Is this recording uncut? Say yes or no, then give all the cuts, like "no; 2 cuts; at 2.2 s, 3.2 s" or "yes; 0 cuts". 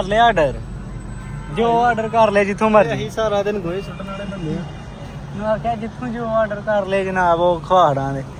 yes; 0 cuts